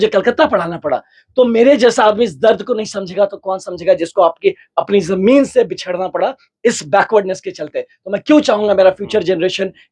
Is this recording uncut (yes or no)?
yes